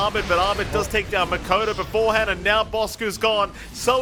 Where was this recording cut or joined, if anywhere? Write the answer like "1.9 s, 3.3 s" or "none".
none